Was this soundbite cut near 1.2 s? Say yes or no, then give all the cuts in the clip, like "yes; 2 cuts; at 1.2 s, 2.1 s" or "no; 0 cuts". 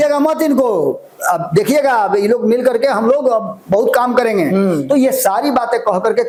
no; 0 cuts